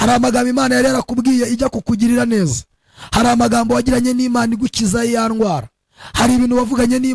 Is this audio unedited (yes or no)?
yes